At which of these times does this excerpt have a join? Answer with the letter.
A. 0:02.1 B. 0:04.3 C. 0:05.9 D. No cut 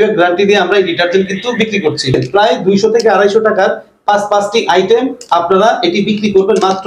A